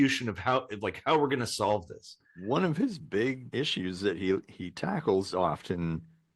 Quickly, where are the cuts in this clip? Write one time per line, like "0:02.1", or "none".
0:03.4

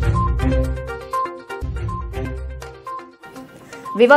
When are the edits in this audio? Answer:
0:01.5

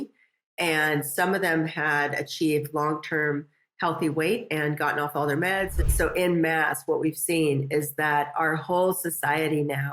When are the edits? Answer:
0:05.8

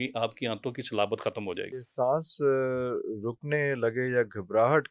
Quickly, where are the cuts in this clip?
0:01.8

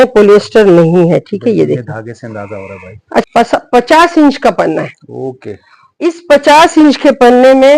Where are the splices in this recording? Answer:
0:03.2

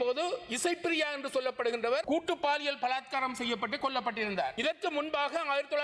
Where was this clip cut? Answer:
0:02.0
0:04.6

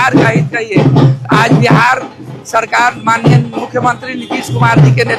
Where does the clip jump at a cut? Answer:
none

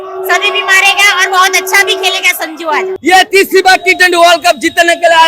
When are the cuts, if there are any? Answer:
0:02.9

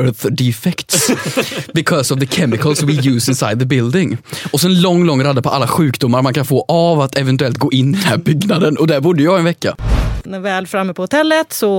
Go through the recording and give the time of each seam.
0:09.9

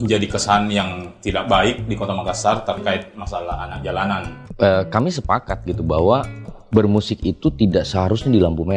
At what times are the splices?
0:04.4

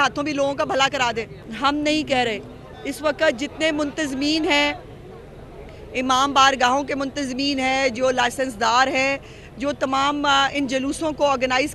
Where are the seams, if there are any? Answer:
0:01.5

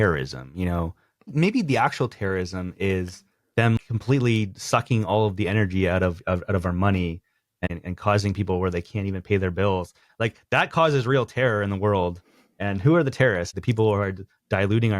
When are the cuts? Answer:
0:01.3
0:03.8
0:07.7
0:13.6

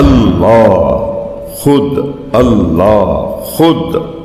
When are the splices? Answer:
none

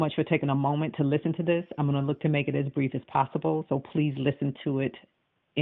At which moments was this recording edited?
none

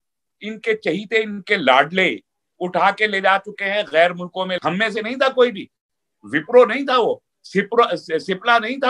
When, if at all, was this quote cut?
0:04.6

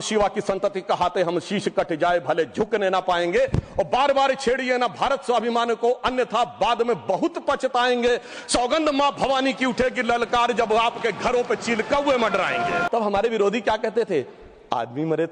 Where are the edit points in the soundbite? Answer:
0:12.9

